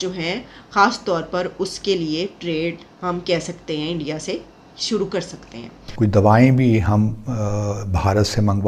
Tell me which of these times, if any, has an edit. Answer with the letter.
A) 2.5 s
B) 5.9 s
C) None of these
B